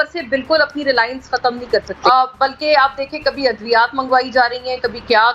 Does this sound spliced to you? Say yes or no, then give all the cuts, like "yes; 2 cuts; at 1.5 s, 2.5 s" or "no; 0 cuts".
yes; 1 cut; at 1.9 s